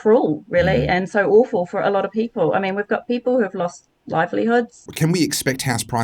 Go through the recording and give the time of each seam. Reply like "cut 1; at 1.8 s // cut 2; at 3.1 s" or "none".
cut 1; at 4.8 s

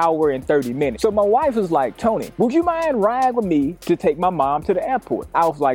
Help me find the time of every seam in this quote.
cut 1; at 0.9 s

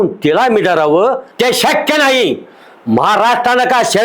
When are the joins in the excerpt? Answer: cut 1; at 1.3 s

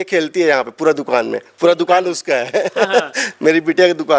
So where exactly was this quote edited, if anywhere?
none

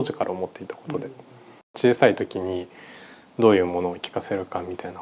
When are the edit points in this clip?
cut 1; at 1.8 s

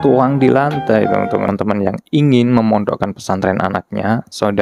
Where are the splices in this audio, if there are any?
cut 1; at 1.5 s

